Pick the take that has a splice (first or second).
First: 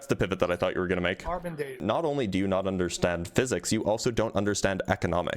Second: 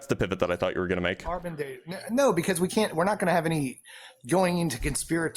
first